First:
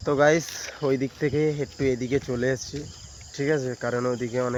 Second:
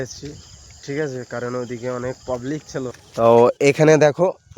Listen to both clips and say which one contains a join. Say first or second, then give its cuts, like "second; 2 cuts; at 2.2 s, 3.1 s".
second; 1 cut; at 3.0 s